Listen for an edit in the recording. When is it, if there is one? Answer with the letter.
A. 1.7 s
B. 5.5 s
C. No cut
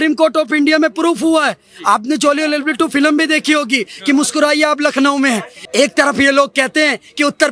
B